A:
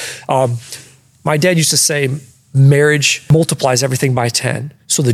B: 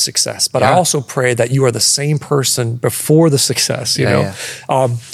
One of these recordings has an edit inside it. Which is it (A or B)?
A